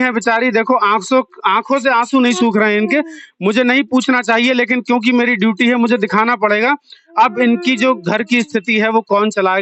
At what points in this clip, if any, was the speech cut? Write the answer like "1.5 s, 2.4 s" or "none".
none